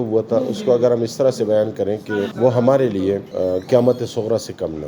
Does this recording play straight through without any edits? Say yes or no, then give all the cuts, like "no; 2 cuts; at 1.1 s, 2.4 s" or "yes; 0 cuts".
no; 2 cuts; at 2.3 s, 3.3 s